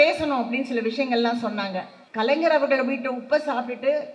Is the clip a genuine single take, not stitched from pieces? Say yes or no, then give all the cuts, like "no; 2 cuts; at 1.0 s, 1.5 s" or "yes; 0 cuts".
no; 1 cut; at 2.0 s